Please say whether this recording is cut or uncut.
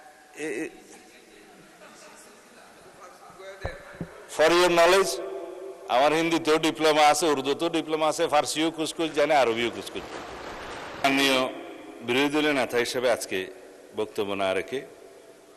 cut